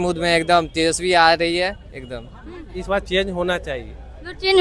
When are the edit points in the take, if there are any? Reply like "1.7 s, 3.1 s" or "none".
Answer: 2.8 s